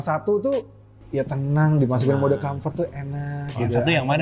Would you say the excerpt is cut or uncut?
cut